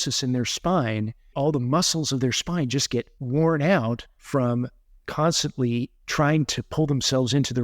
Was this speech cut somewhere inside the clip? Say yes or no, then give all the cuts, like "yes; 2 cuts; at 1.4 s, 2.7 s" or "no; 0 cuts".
yes; 4 cuts; at 1.3 s, 3.2 s, 4.1 s, 6.0 s